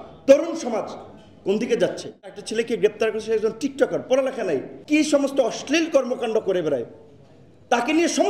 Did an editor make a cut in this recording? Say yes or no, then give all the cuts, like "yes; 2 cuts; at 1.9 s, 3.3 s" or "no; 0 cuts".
yes; 2 cuts; at 2.4 s, 4.7 s